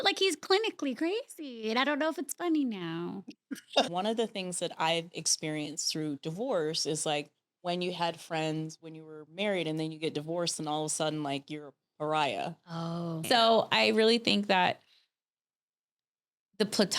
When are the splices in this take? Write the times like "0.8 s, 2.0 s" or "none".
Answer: 3.9 s, 13.2 s